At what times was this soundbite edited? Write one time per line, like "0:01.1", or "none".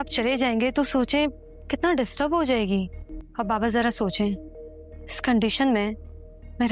none